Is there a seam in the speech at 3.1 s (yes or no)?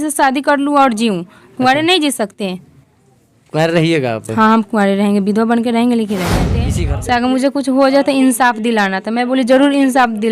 no